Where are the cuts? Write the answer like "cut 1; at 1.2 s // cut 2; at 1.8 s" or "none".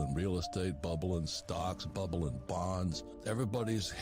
cut 1; at 3.1 s